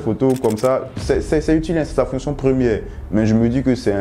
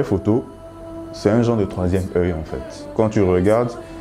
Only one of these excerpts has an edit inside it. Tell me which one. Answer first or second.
second